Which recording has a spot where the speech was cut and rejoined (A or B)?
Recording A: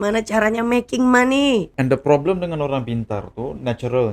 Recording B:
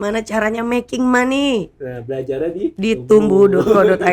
A